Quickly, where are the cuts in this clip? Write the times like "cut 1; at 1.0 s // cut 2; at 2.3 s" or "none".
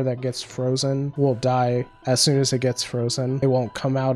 cut 1; at 1.1 s // cut 2; at 1.9 s // cut 3; at 3.4 s